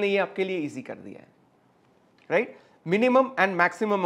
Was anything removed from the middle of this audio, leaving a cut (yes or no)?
no